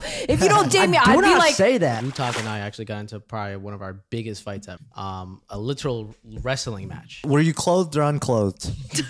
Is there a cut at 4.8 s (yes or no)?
yes